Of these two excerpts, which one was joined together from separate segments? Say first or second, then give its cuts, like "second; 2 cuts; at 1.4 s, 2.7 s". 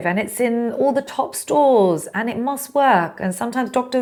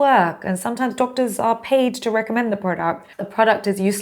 second; 1 cut; at 3.1 s